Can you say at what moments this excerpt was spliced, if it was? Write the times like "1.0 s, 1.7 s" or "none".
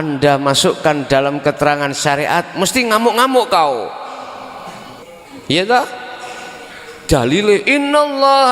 5.0 s